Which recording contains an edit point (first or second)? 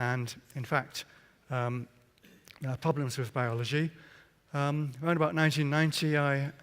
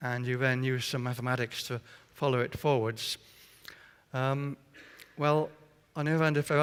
first